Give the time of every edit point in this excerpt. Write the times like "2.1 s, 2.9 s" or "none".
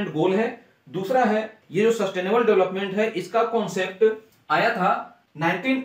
1.6 s